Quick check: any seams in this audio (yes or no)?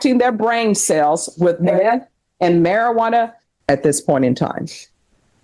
yes